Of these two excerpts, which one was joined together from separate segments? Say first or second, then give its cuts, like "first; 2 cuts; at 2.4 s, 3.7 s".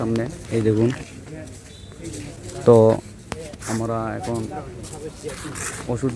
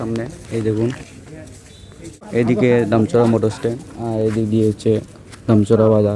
second; 1 cut; at 2.3 s